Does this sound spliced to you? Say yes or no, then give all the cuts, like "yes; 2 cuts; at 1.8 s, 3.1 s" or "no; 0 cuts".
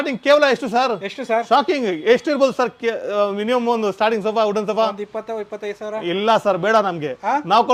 no; 0 cuts